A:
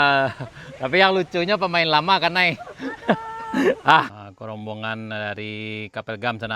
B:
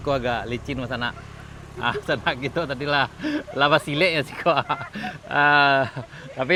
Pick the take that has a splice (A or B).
A